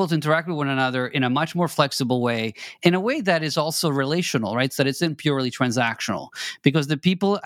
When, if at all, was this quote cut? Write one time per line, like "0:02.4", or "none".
none